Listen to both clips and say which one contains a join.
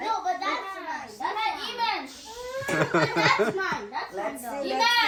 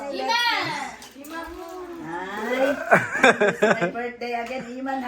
second; 1 cut; at 3.1 s

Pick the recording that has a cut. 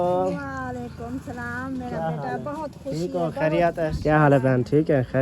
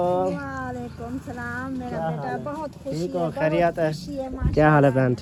first; 1 cut; at 4.0 s

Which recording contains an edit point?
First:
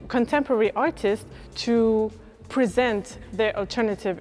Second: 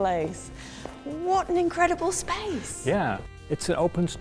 second; 1 cut; at 3.3 s

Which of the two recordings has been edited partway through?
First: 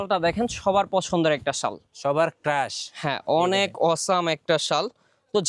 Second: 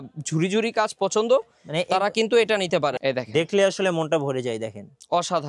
second; 1 cut; at 3.0 s

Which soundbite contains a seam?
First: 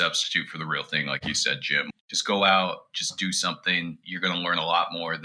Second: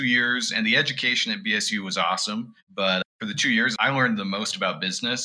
second; 1 cut; at 3.0 s

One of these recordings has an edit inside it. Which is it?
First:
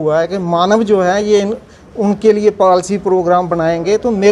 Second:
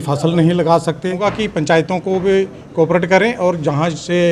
second; 1 cut; at 1.2 s

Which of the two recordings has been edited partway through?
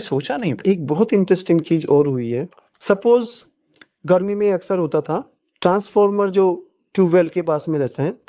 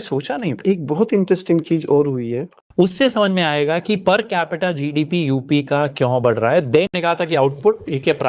second; 2 cuts; at 2.5 s, 6.9 s

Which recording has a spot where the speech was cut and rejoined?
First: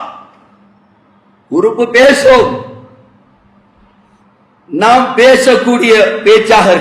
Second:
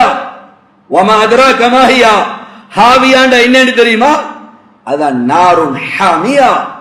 first; 1 cut; at 4.2 s

